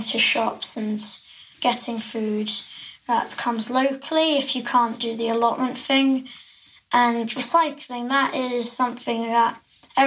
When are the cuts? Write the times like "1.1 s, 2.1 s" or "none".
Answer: 1.4 s

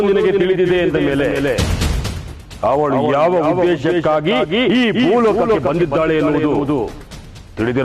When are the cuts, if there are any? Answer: none

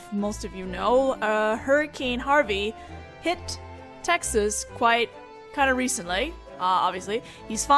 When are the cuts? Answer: 2.9 s

